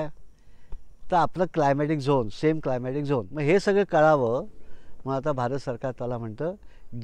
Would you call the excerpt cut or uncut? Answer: cut